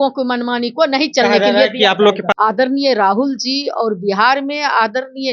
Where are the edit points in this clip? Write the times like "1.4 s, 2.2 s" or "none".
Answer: 2.4 s